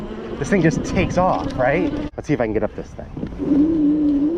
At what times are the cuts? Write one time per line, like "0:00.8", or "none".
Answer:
0:02.0